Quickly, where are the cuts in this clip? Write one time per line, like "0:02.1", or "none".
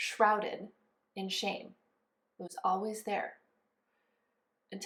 none